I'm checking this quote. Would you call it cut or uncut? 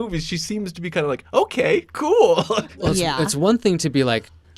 cut